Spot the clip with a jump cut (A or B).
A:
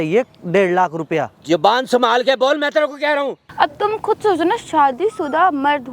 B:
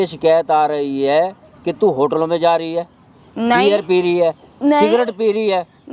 A